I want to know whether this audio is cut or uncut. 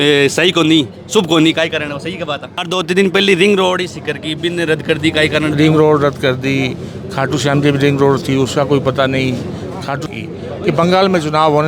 cut